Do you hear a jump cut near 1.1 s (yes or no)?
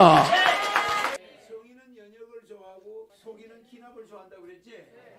yes